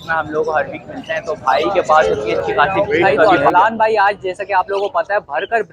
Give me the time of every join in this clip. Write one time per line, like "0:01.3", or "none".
0:03.1